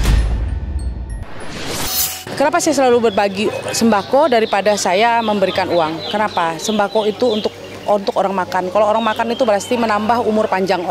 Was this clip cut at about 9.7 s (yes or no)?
no